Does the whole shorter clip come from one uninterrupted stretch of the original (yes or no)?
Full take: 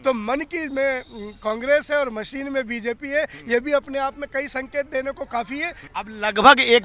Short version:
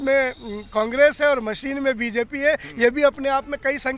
yes